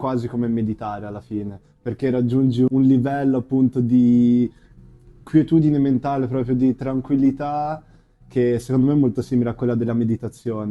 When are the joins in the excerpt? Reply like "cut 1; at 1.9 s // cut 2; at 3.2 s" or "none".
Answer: cut 1; at 2.7 s